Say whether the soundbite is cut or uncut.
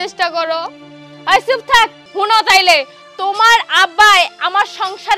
cut